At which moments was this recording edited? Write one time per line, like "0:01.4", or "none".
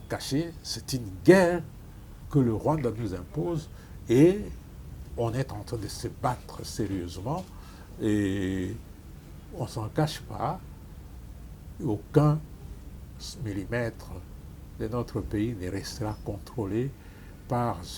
none